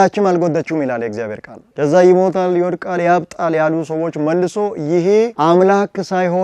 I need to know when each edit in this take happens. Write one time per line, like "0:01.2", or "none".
none